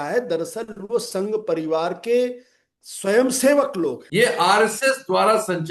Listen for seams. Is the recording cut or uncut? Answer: cut